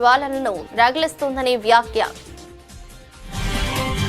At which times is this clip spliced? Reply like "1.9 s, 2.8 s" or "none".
2.2 s